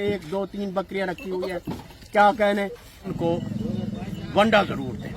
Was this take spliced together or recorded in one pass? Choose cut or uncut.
cut